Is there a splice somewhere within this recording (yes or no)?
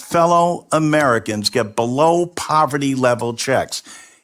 no